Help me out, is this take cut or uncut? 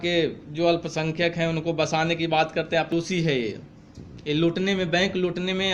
cut